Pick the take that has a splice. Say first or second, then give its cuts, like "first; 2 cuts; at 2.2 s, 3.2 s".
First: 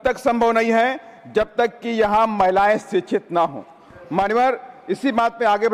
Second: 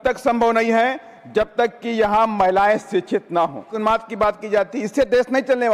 second; 1 cut; at 3.7 s